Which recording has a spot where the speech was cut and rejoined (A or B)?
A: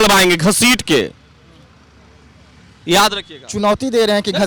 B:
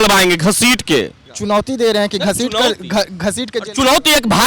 B